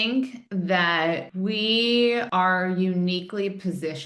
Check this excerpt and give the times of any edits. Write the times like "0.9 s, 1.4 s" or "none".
1.3 s, 2.3 s